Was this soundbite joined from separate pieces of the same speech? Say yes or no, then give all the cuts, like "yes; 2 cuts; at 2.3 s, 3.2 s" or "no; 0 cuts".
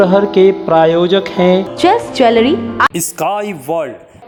no; 0 cuts